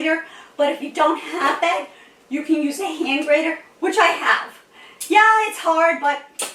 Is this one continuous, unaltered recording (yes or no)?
yes